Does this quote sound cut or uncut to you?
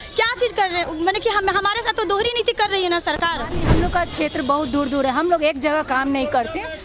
cut